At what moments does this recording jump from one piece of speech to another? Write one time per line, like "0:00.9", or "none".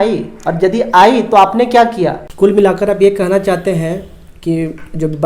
0:02.3